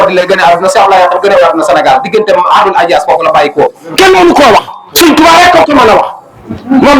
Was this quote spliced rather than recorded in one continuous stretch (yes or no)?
yes